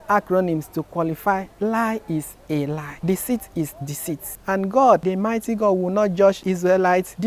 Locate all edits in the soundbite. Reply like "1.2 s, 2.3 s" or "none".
4.3 s, 5.0 s